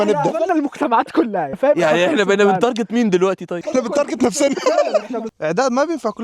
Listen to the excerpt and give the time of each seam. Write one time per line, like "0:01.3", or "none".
0:01.5
0:03.6
0:05.2